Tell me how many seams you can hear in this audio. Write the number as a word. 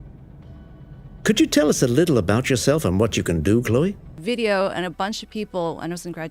zero